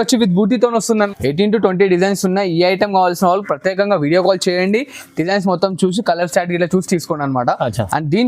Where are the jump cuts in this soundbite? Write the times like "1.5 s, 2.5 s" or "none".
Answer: 1.1 s